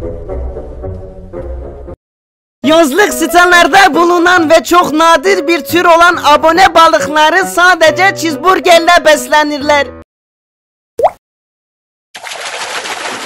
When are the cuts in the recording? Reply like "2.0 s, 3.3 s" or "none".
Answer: none